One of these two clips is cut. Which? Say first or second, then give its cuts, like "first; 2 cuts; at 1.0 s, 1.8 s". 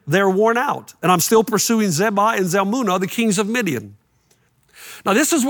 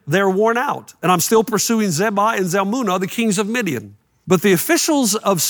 first; 1 cut; at 4.1 s